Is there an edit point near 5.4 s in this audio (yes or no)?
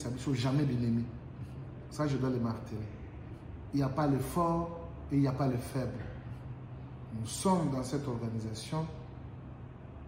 no